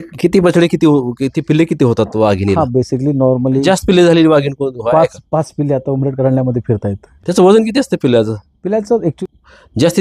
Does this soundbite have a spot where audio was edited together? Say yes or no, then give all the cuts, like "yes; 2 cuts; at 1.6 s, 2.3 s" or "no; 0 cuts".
yes; 3 cuts; at 3.6 s, 7.1 s, 9.2 s